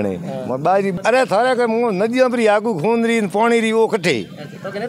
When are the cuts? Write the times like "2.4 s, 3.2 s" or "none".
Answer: 0.9 s